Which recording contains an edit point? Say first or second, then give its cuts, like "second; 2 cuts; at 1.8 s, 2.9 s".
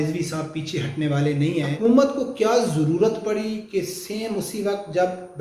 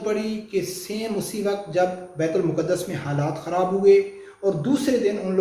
first; 1 cut; at 1.7 s